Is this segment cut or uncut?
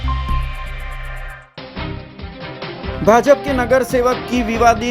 cut